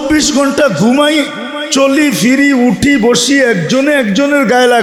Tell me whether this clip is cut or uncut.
uncut